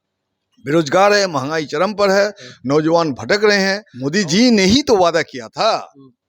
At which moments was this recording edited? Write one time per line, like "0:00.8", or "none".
0:03.9